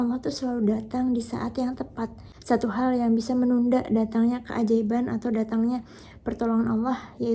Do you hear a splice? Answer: no; 0 cuts

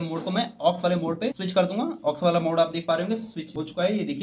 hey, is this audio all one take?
yes; 0 cuts

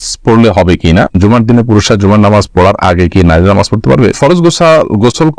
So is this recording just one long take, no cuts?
no; 2 cuts; at 1.1 s, 4.2 s

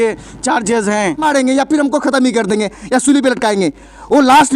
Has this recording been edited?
yes; 1 cut; at 1.2 s

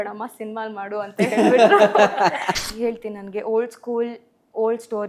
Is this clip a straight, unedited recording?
no; 1 cut; at 2.6 s

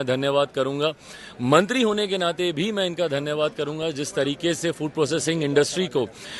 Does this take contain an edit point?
no; 0 cuts

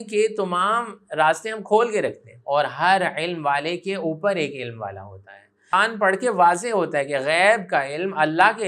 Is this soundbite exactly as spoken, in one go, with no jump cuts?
no; 2 cuts; at 2.3 s, 5.7 s

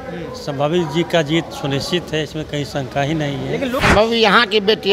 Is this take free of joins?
no; 1 cut; at 3.8 s

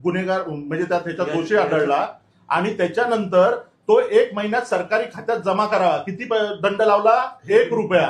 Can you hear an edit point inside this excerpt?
no; 0 cuts

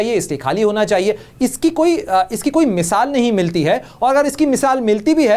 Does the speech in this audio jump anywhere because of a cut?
no; 0 cuts

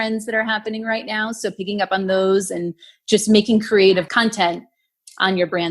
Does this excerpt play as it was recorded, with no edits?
no; 1 cut; at 4.1 s

